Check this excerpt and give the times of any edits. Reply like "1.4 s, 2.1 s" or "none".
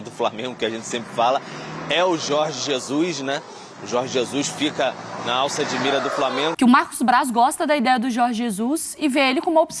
6.5 s